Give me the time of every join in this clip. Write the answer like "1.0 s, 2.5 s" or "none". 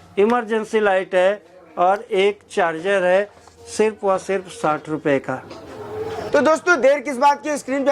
6.1 s